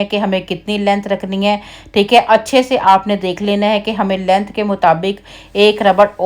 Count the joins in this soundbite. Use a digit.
0